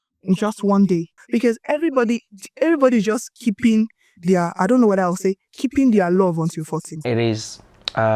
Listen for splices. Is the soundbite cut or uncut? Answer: cut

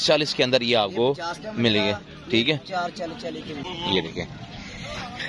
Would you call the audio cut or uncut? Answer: cut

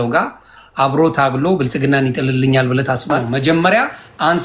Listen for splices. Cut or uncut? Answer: cut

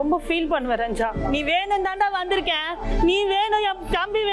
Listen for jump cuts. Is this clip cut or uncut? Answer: cut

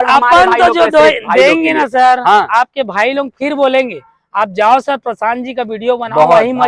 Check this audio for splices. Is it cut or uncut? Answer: uncut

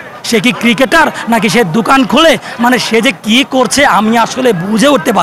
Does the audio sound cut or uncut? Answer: uncut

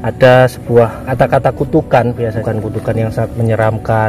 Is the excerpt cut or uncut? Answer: cut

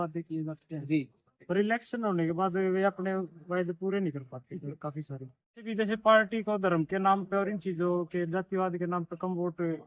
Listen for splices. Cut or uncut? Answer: cut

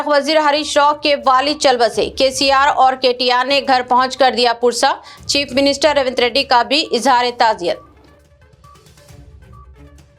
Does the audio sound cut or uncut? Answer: uncut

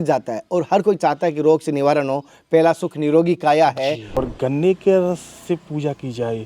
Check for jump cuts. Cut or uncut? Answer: cut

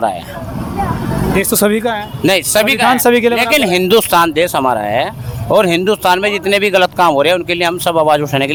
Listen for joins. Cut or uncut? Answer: uncut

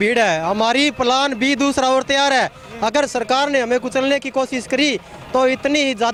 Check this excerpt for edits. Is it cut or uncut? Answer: uncut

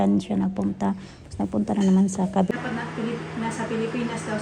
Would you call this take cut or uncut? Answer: cut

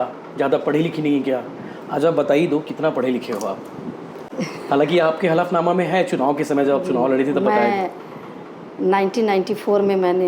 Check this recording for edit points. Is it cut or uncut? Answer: uncut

